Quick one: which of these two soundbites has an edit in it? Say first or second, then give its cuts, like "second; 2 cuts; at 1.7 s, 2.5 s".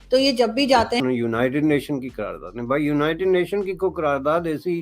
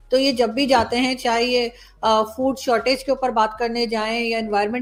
first; 1 cut; at 1.0 s